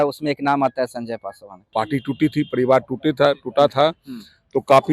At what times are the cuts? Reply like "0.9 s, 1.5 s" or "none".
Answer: 1.7 s